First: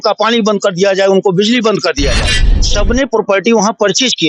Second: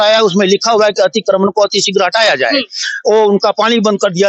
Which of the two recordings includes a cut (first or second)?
first